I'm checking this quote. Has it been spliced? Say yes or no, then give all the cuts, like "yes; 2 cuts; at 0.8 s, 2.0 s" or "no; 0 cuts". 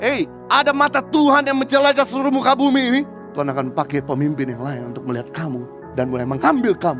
yes; 2 cuts; at 3.2 s, 5.8 s